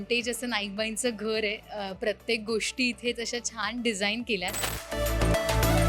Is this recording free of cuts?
no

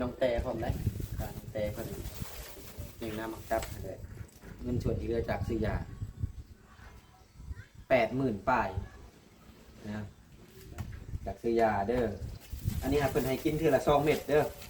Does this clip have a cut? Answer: yes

